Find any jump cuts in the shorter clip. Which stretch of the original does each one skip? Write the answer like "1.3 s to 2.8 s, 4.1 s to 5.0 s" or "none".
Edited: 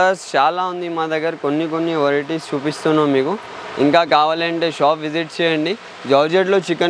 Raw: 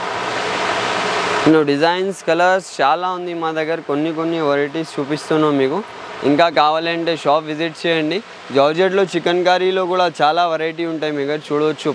none

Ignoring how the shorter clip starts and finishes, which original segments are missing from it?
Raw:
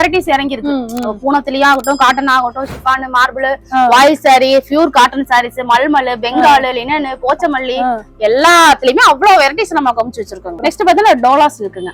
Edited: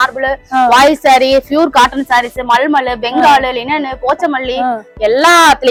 none

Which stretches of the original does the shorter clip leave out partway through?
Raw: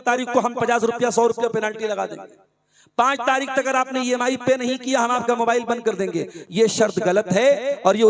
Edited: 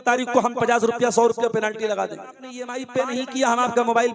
2.7 s to 4.2 s

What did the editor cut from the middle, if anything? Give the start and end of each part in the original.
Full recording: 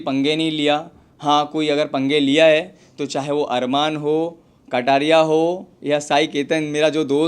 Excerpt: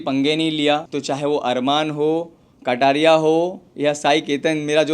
0.9 s to 3.0 s

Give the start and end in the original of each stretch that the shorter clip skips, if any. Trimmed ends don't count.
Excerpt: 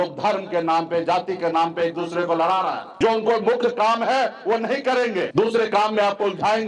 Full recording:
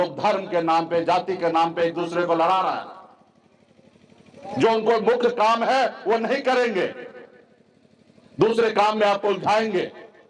3.0 s to 4.6 s, 6.9 s to 8.3 s

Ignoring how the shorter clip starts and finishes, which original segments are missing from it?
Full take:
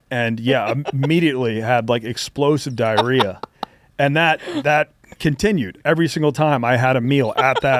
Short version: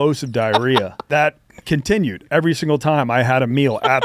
3.5 s to 4.6 s

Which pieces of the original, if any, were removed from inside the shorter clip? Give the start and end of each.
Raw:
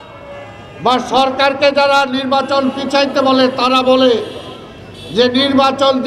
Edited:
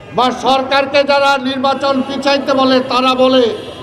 none

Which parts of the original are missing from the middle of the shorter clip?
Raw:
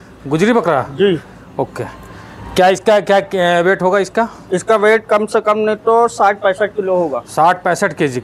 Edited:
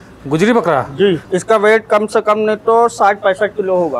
1.2 s to 4.4 s

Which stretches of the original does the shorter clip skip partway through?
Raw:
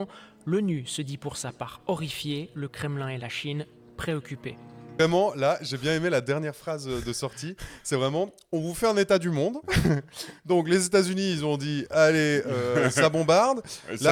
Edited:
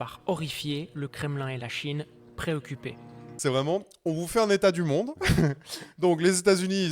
4.7 s to 7.6 s

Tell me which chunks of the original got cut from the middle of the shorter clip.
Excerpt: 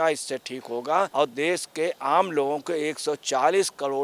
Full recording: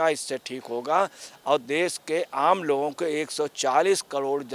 1.1 s to 1.4 s

